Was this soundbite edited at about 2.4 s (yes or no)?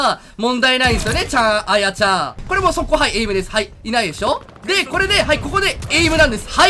yes